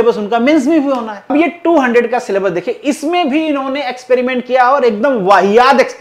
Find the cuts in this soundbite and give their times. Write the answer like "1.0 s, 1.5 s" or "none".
1.3 s